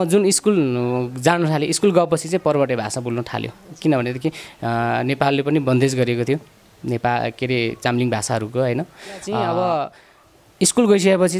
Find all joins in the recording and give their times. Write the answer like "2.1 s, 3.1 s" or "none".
9.3 s